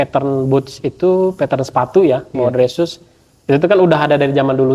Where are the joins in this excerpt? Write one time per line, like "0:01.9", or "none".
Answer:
none